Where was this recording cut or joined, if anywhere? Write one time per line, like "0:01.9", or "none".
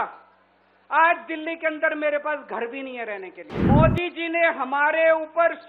0:03.5